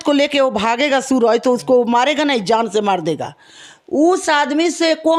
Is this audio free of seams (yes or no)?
yes